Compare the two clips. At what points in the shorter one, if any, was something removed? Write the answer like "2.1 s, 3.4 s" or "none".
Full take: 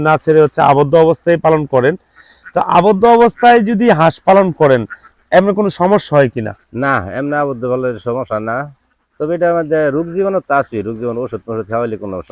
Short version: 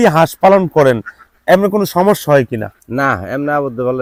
none